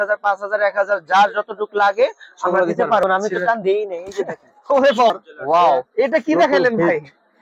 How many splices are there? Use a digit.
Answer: 2